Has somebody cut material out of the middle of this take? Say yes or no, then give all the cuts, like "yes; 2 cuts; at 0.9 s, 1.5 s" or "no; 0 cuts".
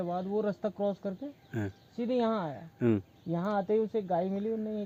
no; 0 cuts